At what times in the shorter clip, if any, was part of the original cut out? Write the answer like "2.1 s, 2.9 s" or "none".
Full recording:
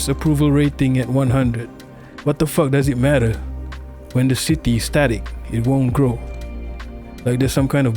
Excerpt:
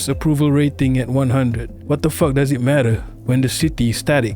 1.7 s, 3.1 s

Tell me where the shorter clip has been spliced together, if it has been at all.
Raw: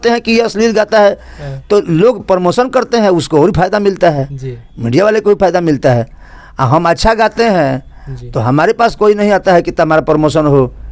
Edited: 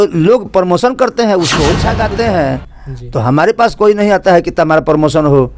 1.8 s

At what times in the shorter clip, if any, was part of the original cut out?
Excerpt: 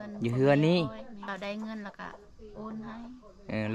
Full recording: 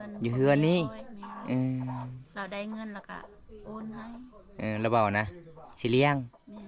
1.2 s

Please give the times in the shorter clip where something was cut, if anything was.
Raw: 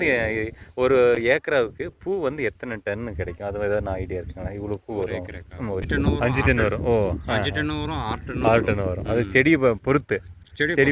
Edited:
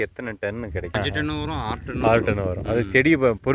0.9 s

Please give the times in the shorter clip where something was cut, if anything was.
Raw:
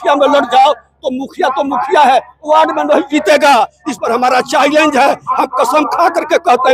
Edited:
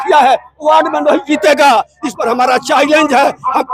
none

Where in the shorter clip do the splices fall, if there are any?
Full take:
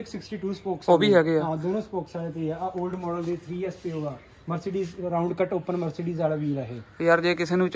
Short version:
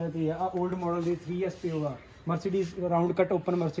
none

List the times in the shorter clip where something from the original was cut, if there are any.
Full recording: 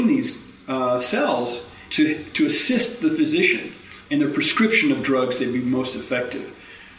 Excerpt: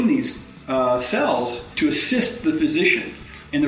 1.7 s

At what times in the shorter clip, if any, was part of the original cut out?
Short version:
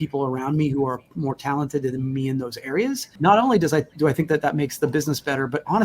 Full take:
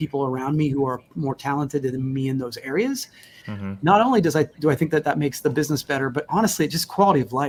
3.1 s

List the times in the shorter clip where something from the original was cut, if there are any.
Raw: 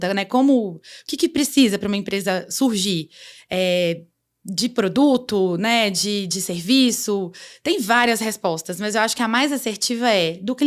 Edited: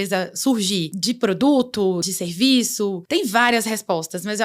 0.9 s, 2.0 s, 3.0 s

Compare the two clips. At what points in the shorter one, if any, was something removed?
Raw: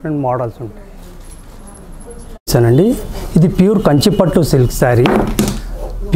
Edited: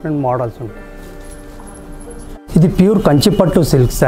2.3 s

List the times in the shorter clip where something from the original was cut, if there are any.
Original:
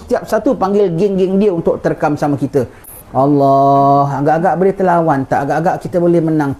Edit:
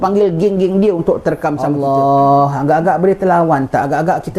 1.7 s

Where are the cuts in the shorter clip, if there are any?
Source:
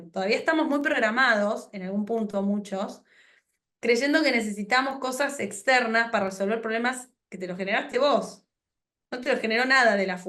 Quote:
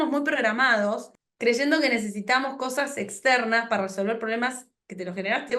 1.1 s

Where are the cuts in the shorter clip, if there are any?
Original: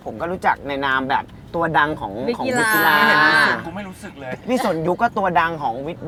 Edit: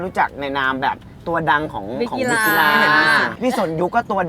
3.3 s

